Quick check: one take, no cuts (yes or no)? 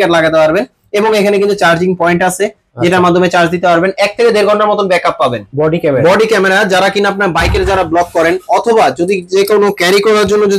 no